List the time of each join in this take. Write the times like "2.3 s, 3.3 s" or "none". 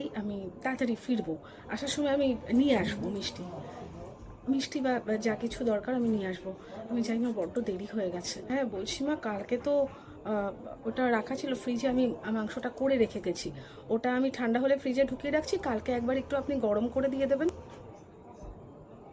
8.5 s